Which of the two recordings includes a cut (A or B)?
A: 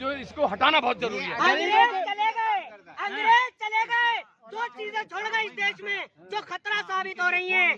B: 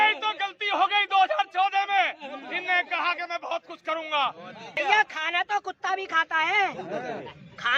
B